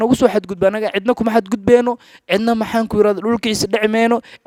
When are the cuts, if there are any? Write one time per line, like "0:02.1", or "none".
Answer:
none